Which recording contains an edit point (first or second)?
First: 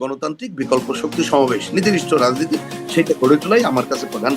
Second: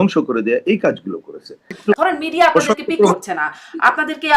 second